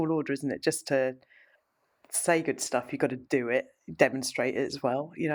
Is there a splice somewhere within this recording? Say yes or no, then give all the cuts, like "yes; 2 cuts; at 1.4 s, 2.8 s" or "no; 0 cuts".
no; 0 cuts